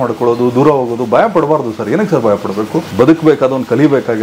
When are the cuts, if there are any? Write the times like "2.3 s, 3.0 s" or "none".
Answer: 2.9 s